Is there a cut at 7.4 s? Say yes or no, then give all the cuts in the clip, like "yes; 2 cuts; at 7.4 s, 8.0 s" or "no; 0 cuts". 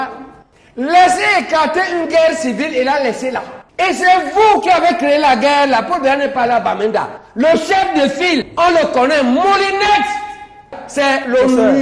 no; 2 cuts; at 3.6 s, 10.8 s